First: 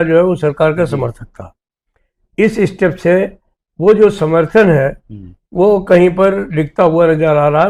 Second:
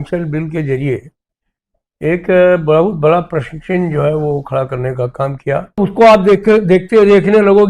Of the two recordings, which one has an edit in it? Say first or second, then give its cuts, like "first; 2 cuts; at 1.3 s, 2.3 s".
second; 1 cut; at 5.8 s